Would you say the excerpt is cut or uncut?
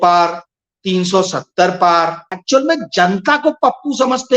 cut